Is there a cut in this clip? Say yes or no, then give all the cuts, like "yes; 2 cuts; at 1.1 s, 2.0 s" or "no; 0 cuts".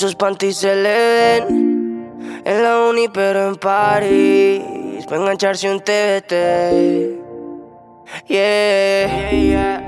no; 0 cuts